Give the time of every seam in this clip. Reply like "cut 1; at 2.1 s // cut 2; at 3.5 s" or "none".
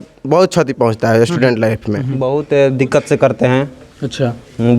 cut 1; at 2.2 s